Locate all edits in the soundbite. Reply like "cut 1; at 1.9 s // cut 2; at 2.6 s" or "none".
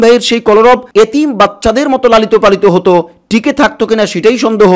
none